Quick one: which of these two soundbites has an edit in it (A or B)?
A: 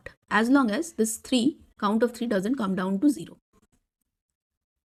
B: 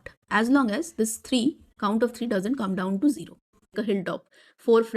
B